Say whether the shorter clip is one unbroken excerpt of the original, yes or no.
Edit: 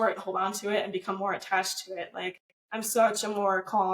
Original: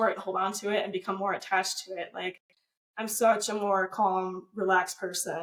no